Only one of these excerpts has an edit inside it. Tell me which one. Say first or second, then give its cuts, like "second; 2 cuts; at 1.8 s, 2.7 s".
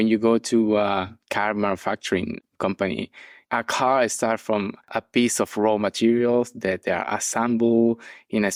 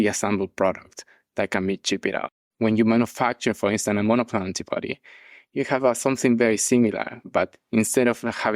second; 1 cut; at 2.4 s